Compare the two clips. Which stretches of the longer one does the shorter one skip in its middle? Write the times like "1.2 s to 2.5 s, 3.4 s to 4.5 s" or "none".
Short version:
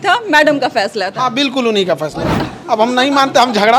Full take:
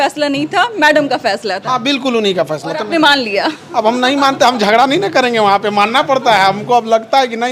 2.9 s to 3.5 s